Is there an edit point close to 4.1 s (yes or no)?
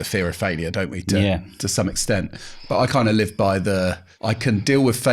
yes